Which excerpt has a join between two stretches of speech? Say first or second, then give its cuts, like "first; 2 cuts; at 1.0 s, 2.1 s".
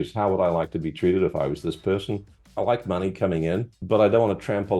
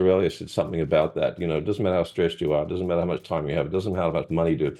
first; 2 cuts; at 2.4 s, 3.7 s